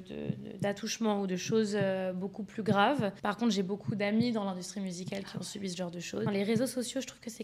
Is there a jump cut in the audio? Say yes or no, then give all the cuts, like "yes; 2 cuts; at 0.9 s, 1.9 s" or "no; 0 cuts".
yes; 2 cuts; at 3.2 s, 6.3 s